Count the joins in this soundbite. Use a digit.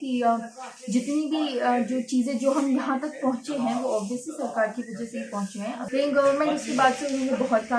1